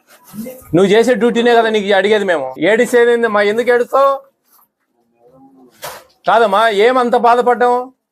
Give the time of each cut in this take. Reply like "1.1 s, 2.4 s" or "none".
2.5 s